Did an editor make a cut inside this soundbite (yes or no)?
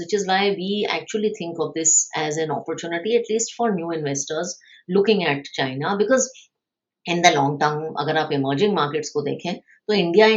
no